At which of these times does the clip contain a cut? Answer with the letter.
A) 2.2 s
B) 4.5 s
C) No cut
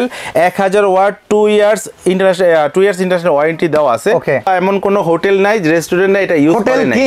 B